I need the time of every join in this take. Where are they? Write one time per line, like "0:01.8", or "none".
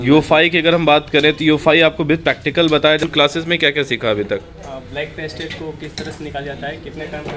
0:03.0

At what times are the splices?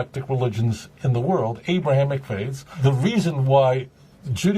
0:02.7

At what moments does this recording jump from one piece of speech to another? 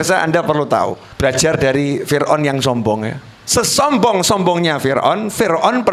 0:01.0

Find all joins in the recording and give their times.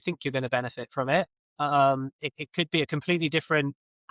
none

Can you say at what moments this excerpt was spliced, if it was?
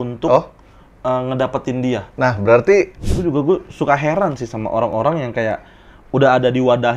0:03.0

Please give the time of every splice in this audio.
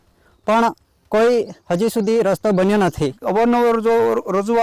0:03.2

